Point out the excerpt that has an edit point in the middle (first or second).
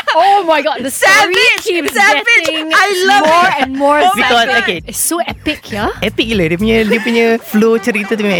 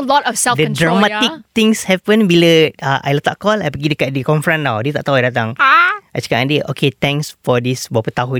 first